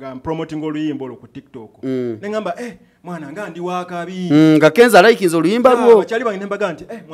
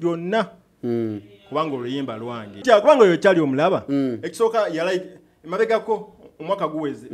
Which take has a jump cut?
second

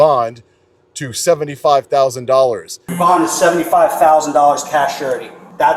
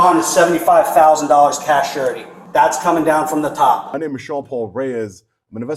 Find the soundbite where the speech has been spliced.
second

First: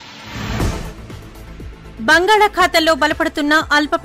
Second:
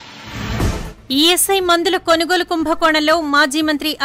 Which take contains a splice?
first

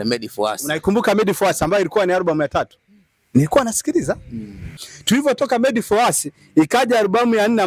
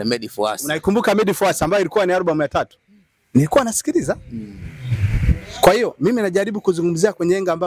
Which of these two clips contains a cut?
first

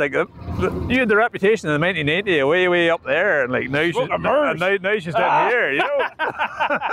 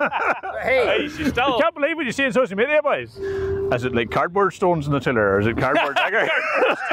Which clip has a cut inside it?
second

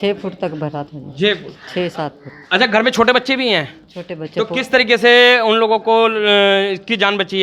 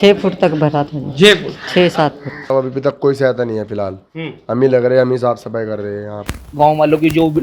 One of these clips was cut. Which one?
second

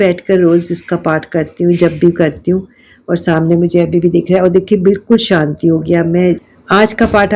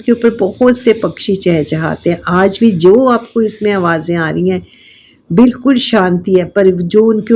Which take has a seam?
first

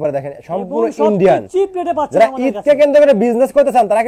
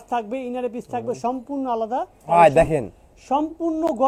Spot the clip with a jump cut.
second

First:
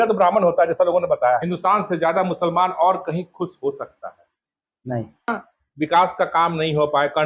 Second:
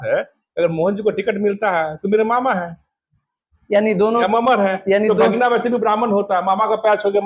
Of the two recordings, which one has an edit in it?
first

